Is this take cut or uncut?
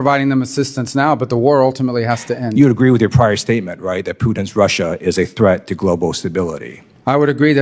cut